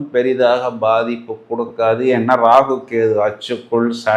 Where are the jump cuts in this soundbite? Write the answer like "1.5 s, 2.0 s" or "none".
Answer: none